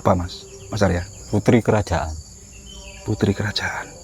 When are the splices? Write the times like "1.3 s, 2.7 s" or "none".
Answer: 1.1 s